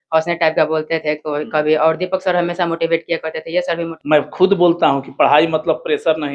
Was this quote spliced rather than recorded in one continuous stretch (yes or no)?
yes